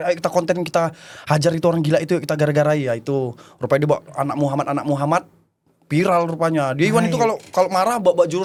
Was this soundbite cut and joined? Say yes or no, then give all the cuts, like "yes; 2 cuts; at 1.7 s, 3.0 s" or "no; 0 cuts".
no; 0 cuts